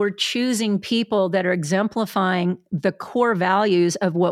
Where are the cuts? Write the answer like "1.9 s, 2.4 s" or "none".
none